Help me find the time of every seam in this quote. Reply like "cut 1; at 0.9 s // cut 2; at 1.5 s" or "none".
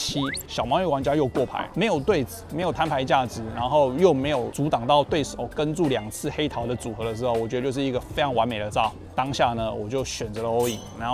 cut 1; at 1.6 s // cut 2; at 9.0 s